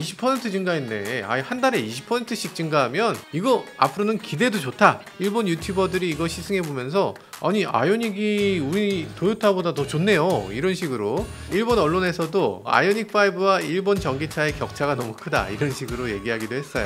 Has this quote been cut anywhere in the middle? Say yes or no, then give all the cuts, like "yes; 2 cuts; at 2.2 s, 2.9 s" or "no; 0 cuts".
yes; 2 cuts; at 5.1 s, 11.4 s